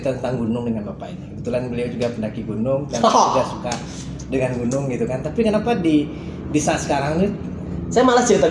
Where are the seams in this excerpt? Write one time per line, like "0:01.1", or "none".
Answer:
none